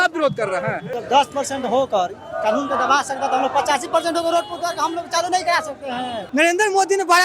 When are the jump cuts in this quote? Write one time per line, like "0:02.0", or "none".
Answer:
0:00.9
0:06.2